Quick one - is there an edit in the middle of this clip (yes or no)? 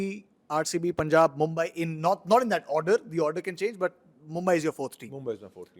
no